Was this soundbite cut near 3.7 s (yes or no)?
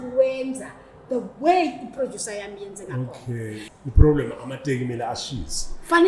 yes